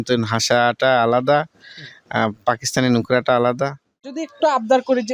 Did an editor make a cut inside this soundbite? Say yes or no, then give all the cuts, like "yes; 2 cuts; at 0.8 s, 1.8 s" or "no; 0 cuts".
yes; 1 cut; at 4.0 s